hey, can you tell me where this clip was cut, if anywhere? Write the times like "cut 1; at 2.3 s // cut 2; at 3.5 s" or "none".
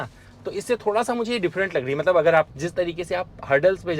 cut 1; at 2.6 s